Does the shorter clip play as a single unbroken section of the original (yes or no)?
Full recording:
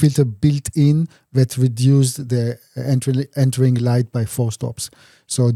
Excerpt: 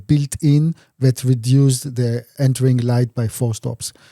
no